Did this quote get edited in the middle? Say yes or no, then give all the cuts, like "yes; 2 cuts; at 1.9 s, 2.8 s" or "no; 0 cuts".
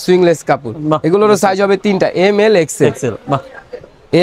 no; 0 cuts